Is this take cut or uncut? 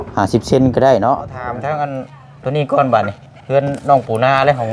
cut